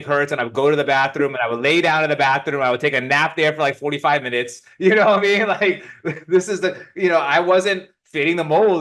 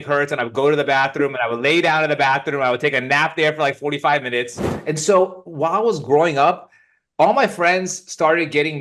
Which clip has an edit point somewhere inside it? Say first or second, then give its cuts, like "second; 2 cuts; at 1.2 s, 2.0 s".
second; 1 cut; at 4.6 s